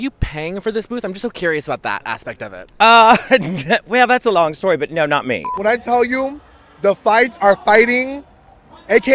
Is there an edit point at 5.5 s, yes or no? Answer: yes